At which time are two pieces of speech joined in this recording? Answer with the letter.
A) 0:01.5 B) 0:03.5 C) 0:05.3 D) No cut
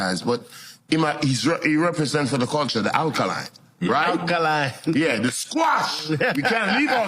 C